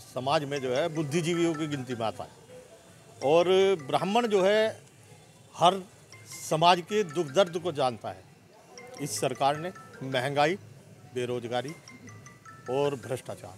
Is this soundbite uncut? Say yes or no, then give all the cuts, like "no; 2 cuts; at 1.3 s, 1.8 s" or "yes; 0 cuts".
yes; 0 cuts